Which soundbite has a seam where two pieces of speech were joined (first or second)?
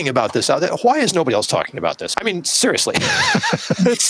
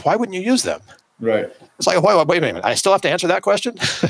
first